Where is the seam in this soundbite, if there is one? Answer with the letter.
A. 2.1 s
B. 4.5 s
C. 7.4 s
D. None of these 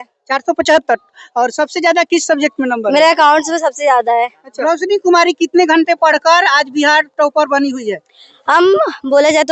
B